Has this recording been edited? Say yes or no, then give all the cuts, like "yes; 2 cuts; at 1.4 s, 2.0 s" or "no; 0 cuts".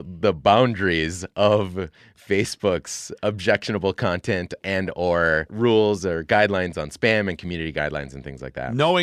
no; 0 cuts